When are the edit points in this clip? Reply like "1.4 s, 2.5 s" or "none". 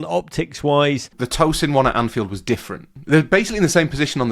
1.2 s, 2.9 s